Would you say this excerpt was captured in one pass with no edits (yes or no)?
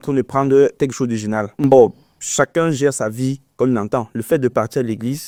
yes